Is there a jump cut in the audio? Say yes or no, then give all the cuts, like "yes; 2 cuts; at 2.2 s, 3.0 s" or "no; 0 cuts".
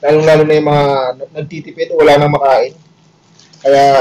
no; 0 cuts